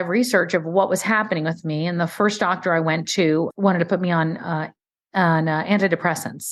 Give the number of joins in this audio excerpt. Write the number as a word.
one